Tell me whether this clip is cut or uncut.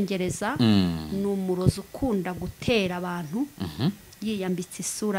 uncut